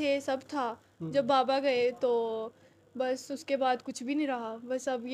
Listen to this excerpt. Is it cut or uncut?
uncut